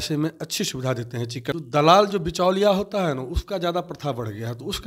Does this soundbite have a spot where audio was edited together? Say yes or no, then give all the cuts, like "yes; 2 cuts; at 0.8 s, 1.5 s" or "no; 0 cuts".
yes; 1 cut; at 1.6 s